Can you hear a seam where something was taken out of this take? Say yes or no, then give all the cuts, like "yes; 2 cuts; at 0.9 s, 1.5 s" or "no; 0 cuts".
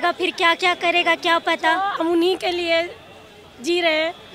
yes; 1 cut; at 1.9 s